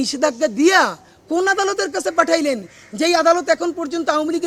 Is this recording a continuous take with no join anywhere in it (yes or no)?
yes